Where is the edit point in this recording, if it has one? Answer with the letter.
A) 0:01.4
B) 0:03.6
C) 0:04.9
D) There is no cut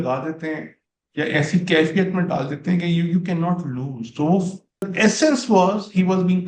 C